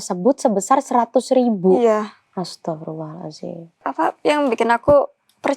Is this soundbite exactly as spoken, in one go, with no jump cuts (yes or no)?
no